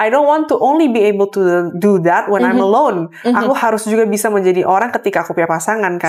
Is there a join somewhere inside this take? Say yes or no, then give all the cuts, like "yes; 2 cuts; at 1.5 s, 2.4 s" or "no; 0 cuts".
no; 0 cuts